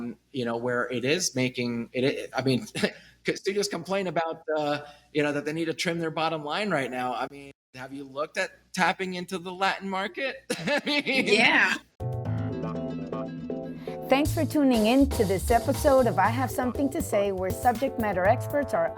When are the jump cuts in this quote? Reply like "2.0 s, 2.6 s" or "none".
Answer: 11.8 s